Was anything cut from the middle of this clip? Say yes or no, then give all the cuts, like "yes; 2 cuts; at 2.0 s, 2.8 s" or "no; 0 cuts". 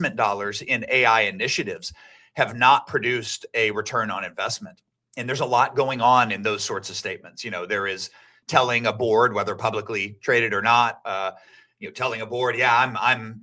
no; 0 cuts